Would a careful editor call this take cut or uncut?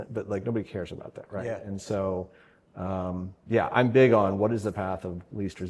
uncut